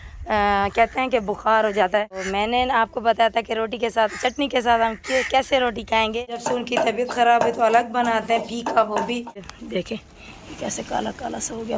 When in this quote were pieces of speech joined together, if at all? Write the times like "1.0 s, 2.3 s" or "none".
2.2 s, 6.4 s, 9.5 s